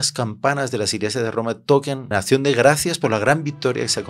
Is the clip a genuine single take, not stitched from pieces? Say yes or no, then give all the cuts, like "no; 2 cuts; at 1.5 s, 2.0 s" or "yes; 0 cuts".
no; 1 cut; at 2.1 s